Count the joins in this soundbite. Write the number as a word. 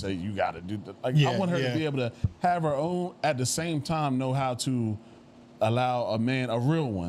zero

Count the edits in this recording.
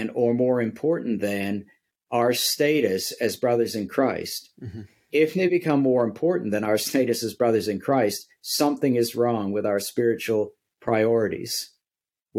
zero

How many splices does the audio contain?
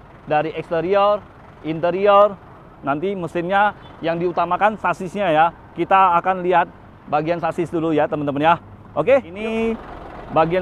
one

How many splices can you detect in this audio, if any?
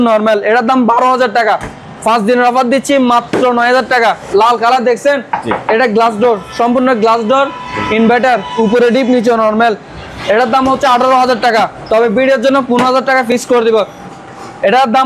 two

